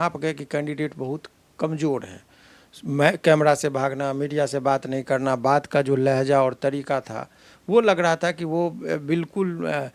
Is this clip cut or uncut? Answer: uncut